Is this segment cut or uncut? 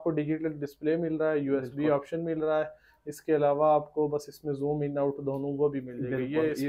uncut